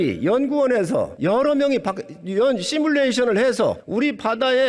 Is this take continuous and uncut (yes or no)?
no